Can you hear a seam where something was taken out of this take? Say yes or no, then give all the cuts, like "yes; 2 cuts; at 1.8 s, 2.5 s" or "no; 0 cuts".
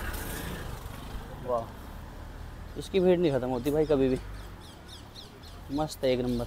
no; 0 cuts